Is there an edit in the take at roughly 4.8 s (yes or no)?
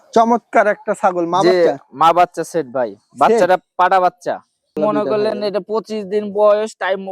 yes